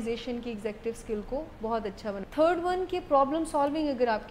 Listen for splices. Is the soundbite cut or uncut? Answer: cut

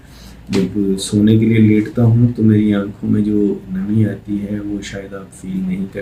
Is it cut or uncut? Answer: uncut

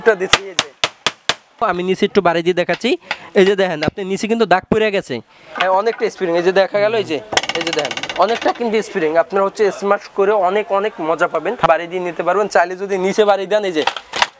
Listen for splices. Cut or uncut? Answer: cut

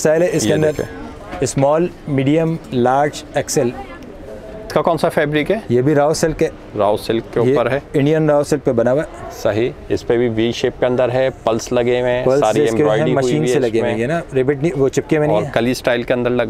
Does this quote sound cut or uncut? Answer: cut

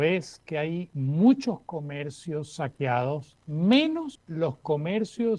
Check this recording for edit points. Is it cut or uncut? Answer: cut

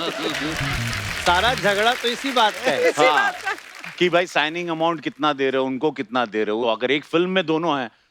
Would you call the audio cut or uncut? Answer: uncut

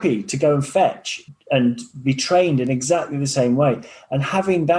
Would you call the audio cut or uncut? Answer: cut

